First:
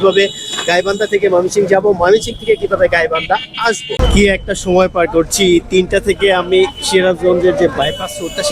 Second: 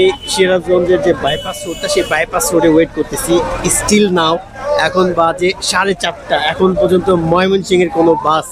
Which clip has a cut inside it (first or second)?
first